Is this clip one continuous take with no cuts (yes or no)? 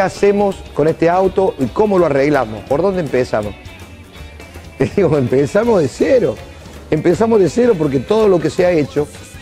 yes